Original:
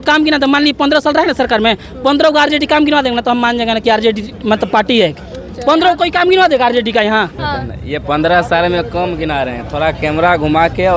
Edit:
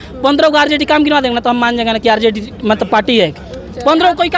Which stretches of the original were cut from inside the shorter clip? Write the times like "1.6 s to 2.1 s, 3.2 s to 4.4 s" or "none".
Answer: none

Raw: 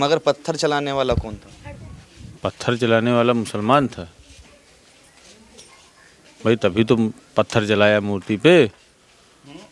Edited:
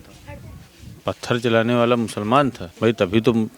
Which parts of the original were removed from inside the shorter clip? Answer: 4.0 s to 6.3 s

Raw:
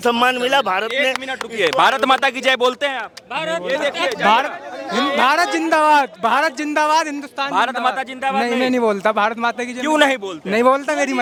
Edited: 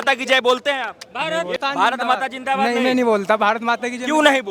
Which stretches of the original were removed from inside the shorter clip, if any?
3.7 s to 7.3 s

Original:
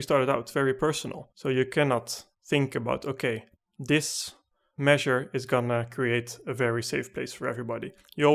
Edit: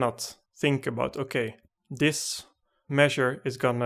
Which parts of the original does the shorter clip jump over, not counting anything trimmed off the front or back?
none

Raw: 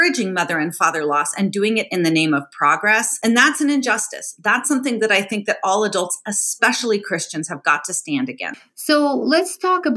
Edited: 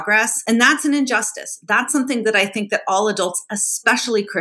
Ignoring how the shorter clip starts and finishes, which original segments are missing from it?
none

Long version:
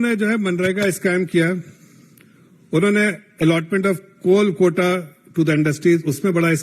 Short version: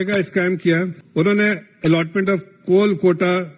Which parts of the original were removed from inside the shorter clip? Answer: 1.7 s to 2.6 s

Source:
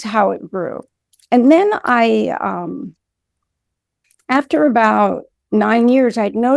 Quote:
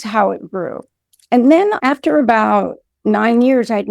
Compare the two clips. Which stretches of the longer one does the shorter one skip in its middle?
1.8 s to 4.3 s

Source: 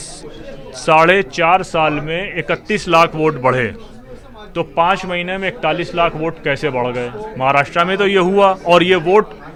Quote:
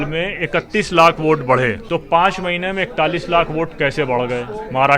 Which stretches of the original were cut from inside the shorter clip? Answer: 3.8 s to 4.5 s

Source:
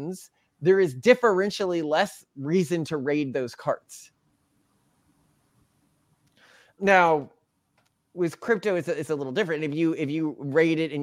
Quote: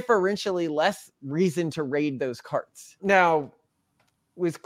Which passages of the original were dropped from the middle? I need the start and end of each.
4.0 s to 6.6 s

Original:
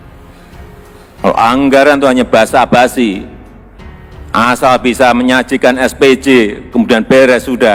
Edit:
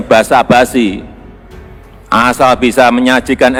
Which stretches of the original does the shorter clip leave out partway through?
none

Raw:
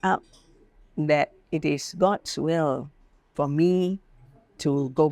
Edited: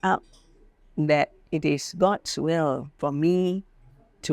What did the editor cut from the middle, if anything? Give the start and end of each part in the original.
2.9 s to 3.2 s

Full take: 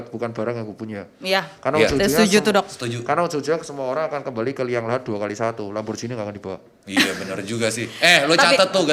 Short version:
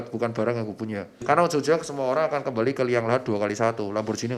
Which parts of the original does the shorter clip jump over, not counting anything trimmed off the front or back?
1.1 s to 2.9 s

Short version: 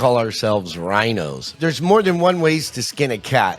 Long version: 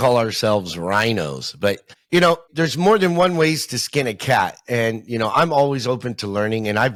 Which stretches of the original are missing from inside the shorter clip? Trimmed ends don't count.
1.5 s to 2.5 s

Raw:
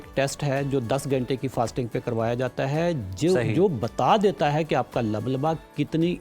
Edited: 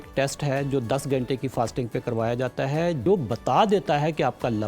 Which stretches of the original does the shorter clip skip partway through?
3.0 s to 3.6 s

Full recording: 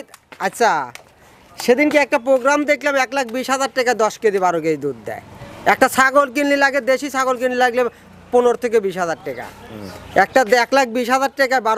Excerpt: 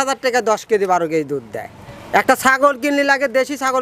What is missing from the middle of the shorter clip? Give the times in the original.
none

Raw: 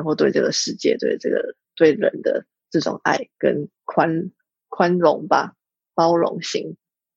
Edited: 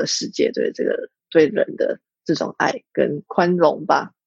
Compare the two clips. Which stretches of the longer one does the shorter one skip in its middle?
3.7 s to 4.6 s

